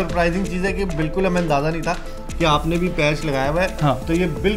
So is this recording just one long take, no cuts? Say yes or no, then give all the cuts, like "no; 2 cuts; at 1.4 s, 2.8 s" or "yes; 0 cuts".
yes; 0 cuts